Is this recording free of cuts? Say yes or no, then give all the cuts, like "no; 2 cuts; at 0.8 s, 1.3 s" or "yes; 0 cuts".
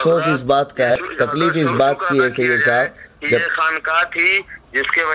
no; 1 cut; at 0.9 s